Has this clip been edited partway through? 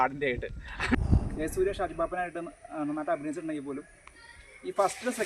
yes; 1 cut; at 1.2 s

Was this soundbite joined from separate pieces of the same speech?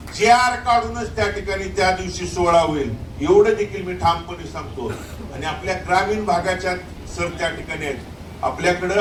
no; 0 cuts

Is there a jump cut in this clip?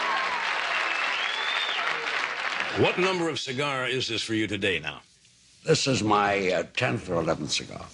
yes; 1 cut; at 4.0 s

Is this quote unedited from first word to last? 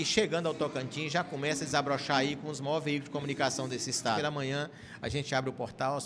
no; 1 cut; at 4.2 s

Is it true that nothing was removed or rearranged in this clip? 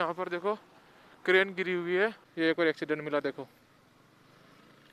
no; 1 cut; at 2.2 s

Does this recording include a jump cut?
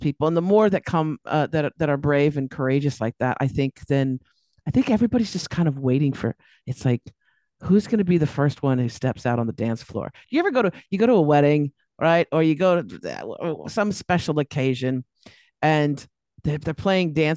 no; 0 cuts

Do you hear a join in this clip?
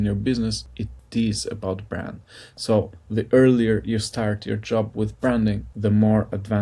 no; 0 cuts

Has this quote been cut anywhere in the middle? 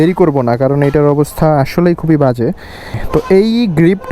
yes; 1 cut; at 2.9 s

